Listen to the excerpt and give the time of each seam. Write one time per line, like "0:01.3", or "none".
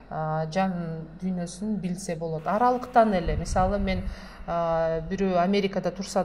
none